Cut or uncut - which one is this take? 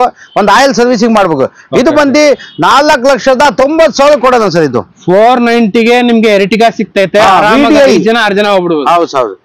uncut